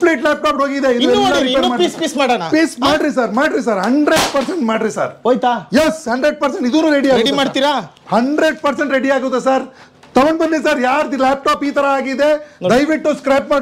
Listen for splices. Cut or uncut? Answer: uncut